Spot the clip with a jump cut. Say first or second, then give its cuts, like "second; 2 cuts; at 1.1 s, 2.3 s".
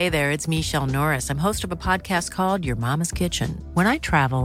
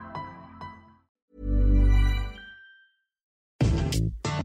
second; 1 cut; at 3.5 s